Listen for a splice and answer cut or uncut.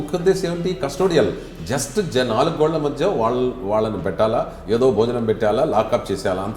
uncut